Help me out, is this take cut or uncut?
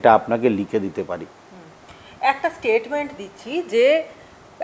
uncut